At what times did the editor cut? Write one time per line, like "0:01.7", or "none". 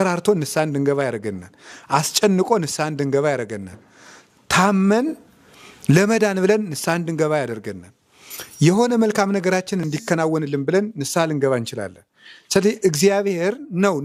none